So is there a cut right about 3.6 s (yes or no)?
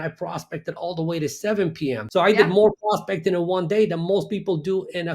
no